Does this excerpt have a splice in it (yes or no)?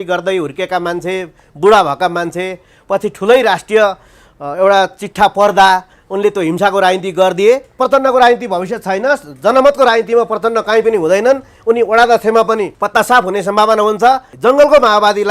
yes